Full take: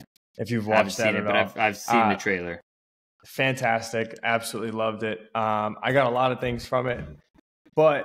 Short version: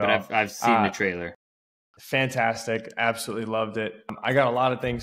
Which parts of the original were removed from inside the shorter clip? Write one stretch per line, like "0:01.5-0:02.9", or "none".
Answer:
0:05.3-0:05.7